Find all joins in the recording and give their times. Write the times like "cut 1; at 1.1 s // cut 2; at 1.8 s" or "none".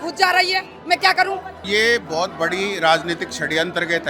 cut 1; at 1.7 s

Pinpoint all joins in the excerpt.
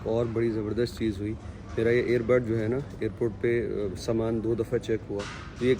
none

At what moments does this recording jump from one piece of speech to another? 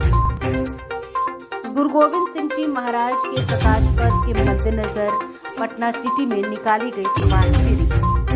none

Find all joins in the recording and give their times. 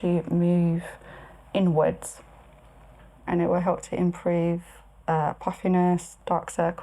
cut 1; at 3.2 s

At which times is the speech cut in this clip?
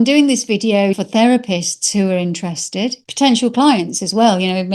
cut 1; at 1.0 s // cut 2; at 3.0 s

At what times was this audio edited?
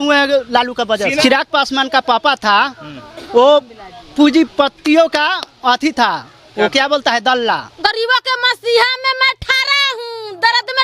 cut 1; at 1.2 s // cut 2; at 7.7 s

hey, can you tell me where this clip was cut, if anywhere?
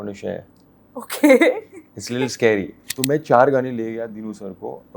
cut 1; at 2.8 s

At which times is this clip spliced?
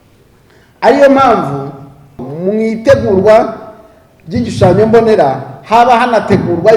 cut 1; at 2.3 s

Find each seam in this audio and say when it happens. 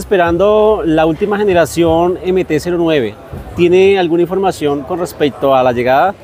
none

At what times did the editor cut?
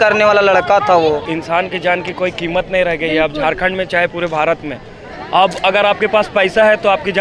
cut 1; at 1.2 s

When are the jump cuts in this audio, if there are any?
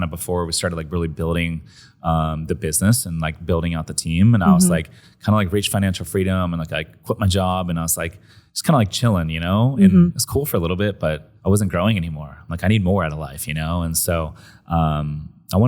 cut 1; at 11.3 s

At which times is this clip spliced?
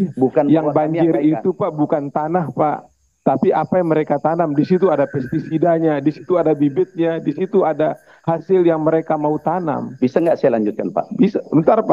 none

